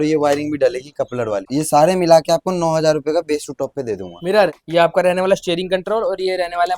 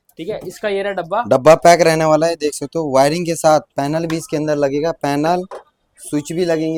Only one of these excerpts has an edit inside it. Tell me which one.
first; 2 cuts; at 1.5 s, 4.6 s

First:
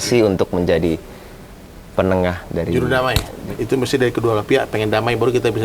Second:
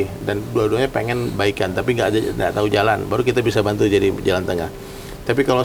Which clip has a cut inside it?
first; 1 cut; at 3.3 s

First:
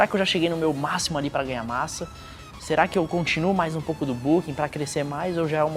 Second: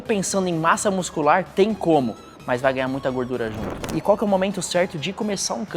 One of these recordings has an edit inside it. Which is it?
second; 1 cut; at 3.8 s

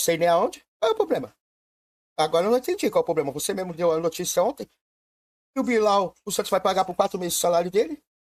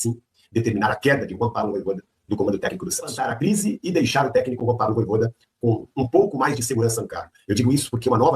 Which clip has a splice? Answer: second; 1 cut; at 3.2 s

